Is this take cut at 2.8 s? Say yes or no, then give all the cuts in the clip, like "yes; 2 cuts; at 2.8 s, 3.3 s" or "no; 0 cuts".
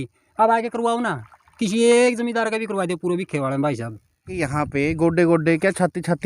no; 1 cut; at 4.4 s